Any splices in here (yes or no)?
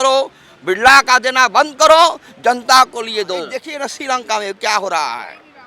yes